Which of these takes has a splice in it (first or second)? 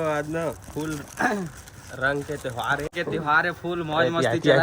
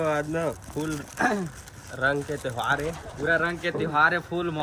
first